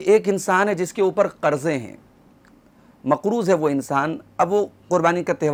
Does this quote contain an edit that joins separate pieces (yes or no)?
no